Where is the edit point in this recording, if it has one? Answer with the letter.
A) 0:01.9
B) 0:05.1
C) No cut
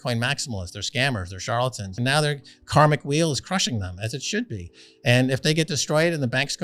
A